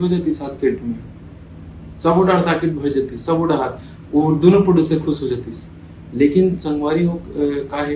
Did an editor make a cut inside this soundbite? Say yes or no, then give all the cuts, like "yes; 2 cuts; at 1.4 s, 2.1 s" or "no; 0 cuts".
no; 0 cuts